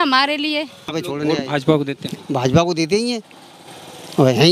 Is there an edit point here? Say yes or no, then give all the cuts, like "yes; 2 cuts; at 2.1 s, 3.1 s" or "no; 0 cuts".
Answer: yes; 1 cut; at 1.0 s